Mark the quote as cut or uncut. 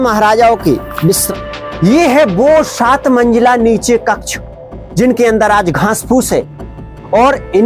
cut